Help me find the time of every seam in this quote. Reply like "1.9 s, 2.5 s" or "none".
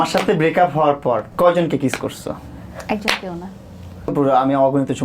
1.3 s, 4.1 s